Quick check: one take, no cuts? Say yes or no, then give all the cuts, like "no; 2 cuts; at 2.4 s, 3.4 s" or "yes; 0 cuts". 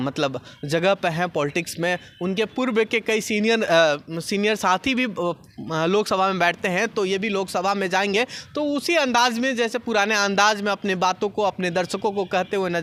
yes; 0 cuts